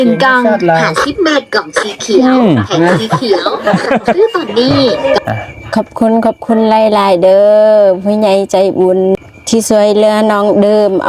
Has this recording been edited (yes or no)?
yes